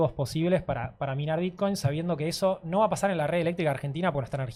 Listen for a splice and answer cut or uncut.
uncut